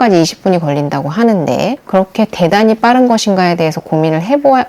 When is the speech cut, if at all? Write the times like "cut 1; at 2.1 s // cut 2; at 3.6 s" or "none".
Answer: cut 1; at 1.8 s